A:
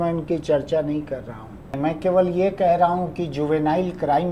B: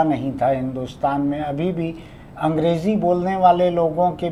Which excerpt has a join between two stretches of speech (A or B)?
A